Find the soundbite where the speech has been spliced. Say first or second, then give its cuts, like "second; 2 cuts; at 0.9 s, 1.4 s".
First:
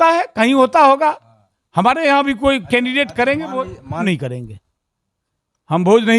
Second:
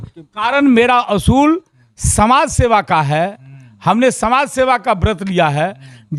first; 1 cut; at 4.0 s